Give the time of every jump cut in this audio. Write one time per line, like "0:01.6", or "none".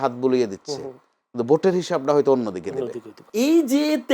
0:03.2